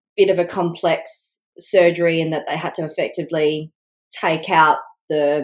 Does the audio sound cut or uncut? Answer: uncut